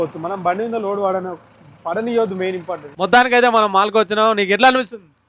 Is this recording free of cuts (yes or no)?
no